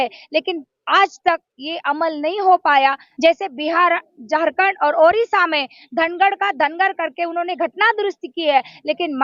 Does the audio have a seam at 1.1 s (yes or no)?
no